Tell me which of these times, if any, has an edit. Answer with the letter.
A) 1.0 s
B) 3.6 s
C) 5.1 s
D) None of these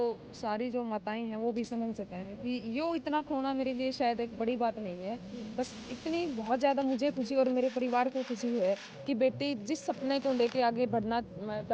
D